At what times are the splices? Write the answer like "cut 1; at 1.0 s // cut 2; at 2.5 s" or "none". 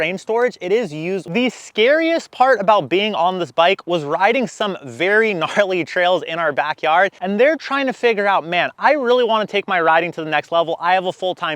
cut 1; at 1.3 s // cut 2; at 7.2 s